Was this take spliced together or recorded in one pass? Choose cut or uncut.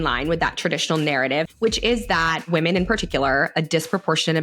cut